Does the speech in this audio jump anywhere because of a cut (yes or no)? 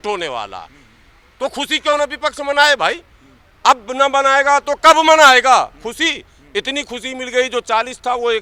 no